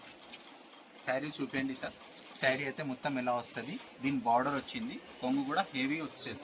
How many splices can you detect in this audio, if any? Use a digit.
0